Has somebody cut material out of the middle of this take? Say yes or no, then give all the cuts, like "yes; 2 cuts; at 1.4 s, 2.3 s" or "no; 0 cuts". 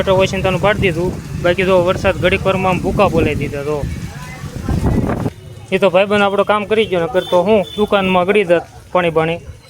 yes; 1 cut; at 5.3 s